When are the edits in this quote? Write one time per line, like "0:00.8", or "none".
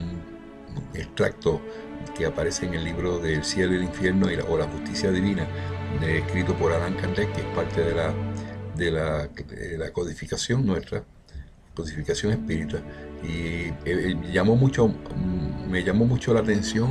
0:07.2